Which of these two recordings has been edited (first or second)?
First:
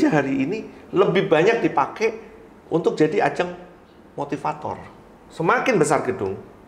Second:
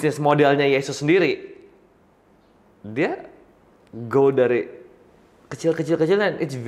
first